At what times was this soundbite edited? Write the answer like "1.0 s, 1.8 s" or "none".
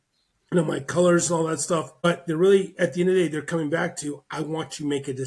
2.1 s